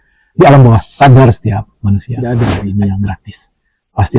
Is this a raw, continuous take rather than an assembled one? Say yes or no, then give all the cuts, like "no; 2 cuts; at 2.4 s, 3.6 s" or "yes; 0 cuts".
no; 1 cut; at 2.2 s